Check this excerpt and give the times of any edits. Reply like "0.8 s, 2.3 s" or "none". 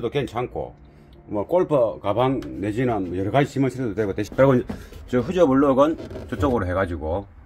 4.2 s